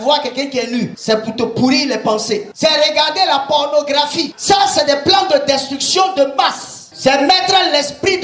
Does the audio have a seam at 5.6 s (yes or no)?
no